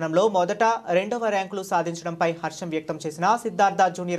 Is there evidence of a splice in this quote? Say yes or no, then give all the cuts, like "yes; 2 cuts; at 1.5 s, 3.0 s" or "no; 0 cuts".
no; 0 cuts